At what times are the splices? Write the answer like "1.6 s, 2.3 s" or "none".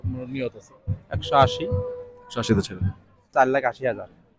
3.2 s